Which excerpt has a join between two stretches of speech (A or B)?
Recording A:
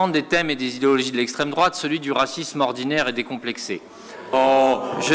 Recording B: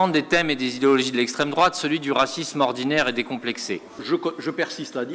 B